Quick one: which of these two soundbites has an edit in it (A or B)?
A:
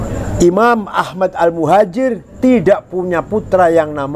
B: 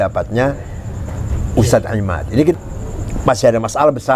B